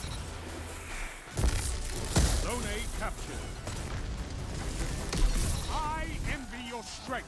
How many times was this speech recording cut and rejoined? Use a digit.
1